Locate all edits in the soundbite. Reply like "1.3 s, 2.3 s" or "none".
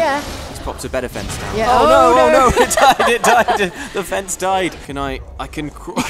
4.8 s